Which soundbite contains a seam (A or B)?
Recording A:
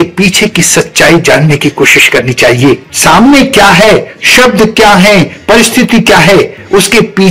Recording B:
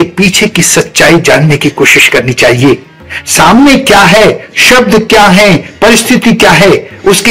A